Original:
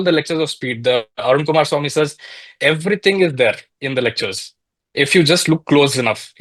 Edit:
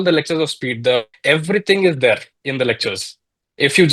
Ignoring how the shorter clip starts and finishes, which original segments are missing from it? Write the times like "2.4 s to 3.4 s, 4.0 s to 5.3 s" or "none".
1.1 s to 2.5 s